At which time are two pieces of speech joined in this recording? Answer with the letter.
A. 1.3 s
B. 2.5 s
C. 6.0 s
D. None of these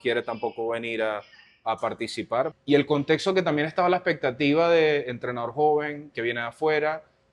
B